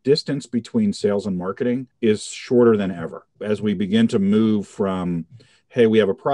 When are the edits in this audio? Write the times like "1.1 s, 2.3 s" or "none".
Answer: 1.9 s, 3.3 s